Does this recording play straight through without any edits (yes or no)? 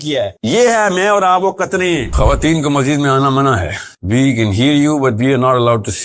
no